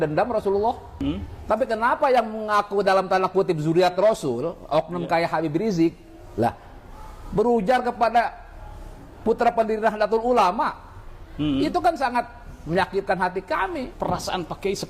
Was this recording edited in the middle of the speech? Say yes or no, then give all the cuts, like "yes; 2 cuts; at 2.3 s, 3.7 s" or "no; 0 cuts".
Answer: yes; 2 cuts; at 0.9 s, 13.9 s